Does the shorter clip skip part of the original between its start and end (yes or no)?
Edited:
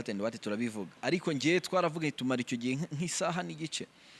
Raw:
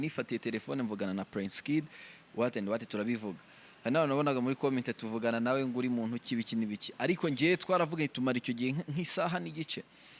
yes